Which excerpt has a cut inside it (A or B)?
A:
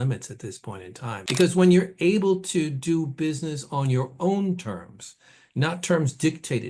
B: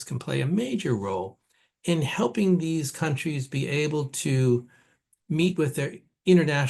A